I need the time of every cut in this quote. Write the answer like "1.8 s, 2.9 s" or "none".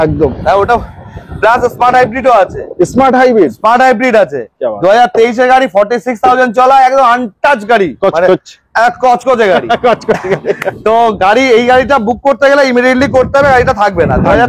none